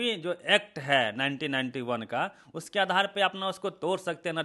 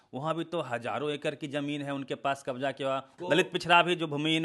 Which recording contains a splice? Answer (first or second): second